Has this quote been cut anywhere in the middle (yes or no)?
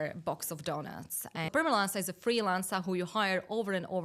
yes